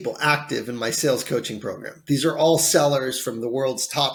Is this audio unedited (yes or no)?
yes